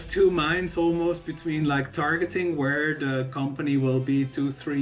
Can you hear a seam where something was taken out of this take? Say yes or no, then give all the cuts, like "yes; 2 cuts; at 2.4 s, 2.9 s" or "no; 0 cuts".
no; 0 cuts